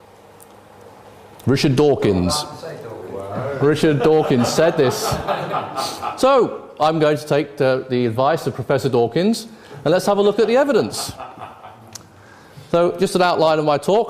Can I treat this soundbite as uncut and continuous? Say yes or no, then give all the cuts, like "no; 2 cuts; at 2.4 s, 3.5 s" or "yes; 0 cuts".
no; 1 cut; at 10.2 s